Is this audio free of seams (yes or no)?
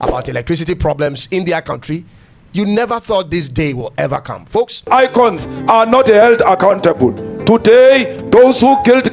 no